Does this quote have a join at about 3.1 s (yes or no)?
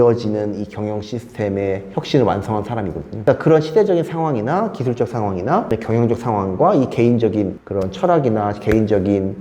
yes